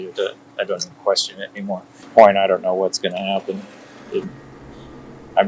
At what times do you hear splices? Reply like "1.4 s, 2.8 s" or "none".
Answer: 2.1 s